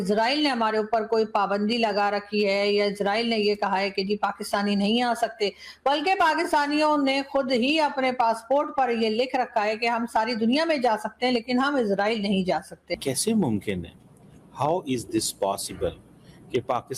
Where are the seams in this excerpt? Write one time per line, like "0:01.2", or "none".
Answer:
0:13.0